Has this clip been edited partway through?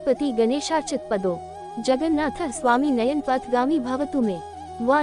no; 0 cuts

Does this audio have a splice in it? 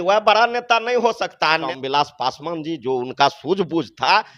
yes; 1 cut; at 1.7 s

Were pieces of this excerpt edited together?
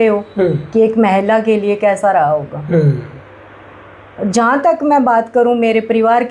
no; 0 cuts

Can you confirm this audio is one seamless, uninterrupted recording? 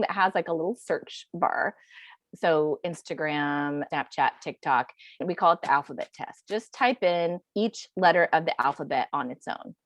no; 4 cuts; at 2.1 s, 3.9 s, 5.2 s, 7.4 s

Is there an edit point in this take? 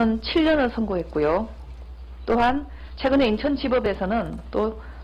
no; 0 cuts

